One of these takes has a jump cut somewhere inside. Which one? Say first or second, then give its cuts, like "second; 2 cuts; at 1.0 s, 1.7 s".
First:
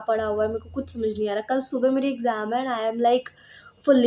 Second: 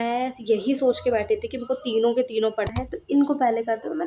second; 1 cut; at 2.7 s